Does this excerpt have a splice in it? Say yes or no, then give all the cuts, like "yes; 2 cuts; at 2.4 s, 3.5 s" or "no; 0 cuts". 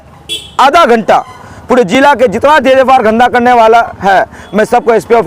no; 0 cuts